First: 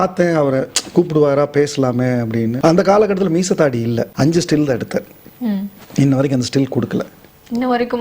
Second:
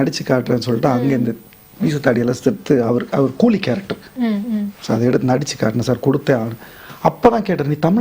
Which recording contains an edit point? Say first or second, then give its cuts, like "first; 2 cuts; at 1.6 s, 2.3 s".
first; 2 cuts; at 2.5 s, 4.1 s